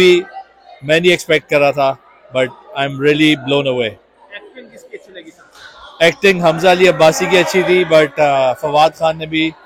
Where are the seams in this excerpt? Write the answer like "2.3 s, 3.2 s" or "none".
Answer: none